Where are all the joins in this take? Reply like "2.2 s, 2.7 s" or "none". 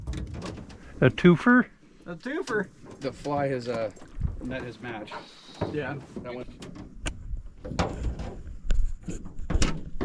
6.4 s